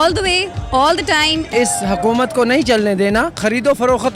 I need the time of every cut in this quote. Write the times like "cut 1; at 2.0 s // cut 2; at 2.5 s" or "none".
cut 1; at 1.5 s // cut 2; at 3.4 s